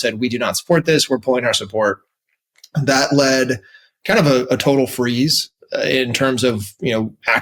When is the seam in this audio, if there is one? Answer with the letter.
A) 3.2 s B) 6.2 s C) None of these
C